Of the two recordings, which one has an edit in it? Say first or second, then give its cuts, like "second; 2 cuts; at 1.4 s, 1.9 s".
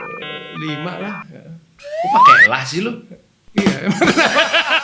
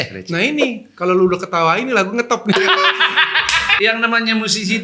second; 1 cut; at 3.7 s